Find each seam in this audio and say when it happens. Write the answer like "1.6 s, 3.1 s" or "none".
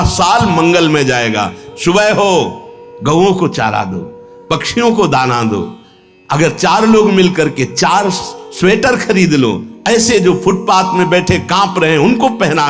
none

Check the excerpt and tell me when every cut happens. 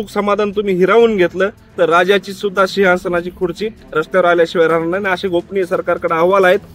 none

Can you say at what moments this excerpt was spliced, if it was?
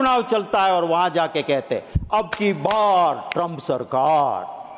none

